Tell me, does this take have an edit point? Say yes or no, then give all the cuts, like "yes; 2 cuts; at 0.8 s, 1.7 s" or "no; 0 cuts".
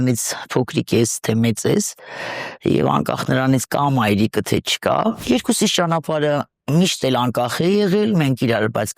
yes; 1 cut; at 5.2 s